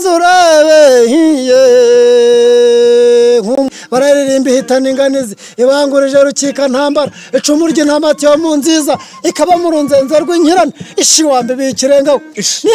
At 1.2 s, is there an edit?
no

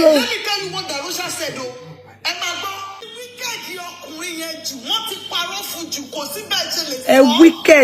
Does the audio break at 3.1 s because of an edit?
yes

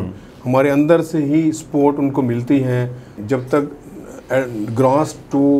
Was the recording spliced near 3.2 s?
yes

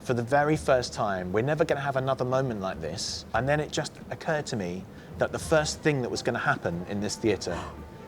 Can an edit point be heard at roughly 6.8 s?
no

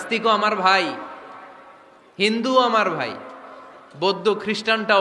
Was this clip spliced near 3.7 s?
no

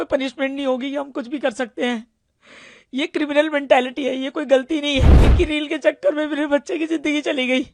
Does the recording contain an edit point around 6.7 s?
no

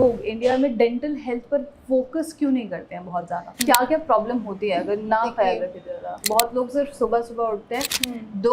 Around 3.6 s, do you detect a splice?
yes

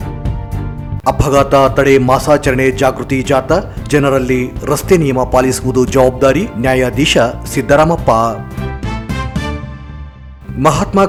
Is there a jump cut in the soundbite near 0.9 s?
no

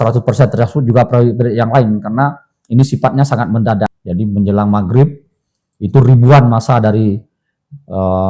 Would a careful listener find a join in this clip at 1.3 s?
no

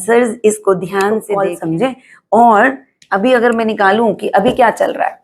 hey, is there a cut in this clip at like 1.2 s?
yes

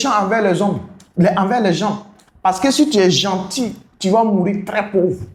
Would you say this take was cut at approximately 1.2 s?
no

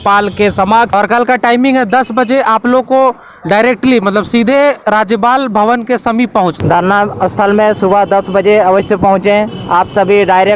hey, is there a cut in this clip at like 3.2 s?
no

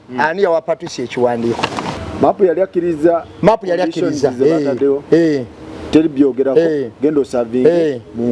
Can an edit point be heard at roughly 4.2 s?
no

